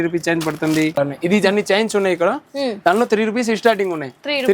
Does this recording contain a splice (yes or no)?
yes